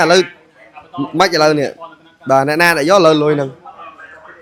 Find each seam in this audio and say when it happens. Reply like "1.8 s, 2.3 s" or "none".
none